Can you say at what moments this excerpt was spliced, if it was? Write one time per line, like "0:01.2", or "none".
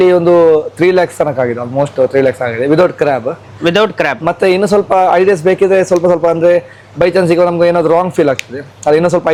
none